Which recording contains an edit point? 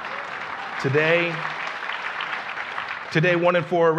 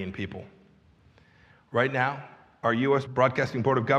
second; 1 cut; at 3.1 s

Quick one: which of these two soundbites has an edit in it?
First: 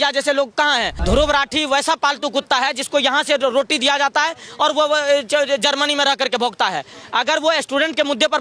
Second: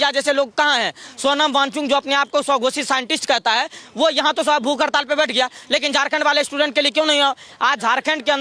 first; 1 cut; at 0.9 s

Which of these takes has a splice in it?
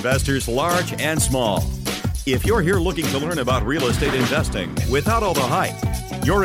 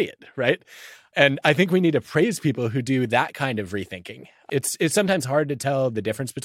second; 2 cuts; at 1.0 s, 4.4 s

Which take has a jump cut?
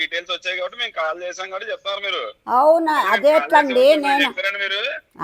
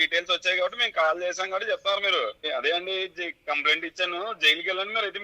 second; 1 cut; at 2.4 s

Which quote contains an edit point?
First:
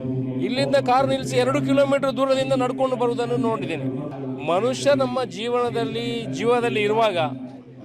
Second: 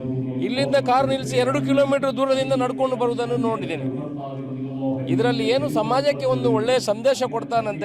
first; 1 cut; at 4.1 s

